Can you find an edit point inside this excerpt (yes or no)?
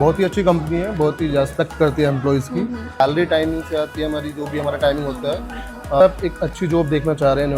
yes